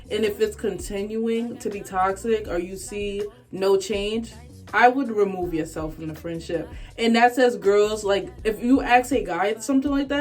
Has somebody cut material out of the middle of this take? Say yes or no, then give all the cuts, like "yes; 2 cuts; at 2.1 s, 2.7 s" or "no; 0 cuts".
no; 0 cuts